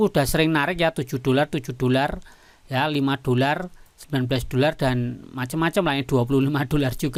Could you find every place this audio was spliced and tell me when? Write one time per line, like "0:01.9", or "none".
none